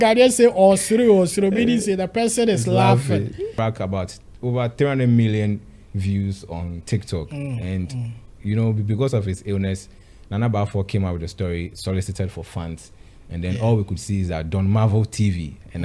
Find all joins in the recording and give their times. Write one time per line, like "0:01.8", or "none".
0:03.6